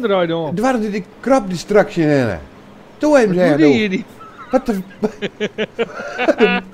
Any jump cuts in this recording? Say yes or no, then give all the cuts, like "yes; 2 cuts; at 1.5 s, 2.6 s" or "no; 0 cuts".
no; 0 cuts